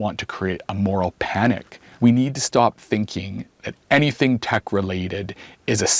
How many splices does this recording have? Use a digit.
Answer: 1